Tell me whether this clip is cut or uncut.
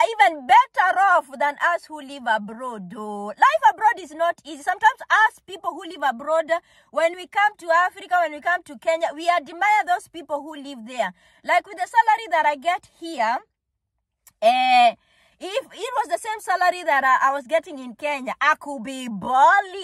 uncut